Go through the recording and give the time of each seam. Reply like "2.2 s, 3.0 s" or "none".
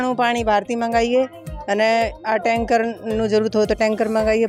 none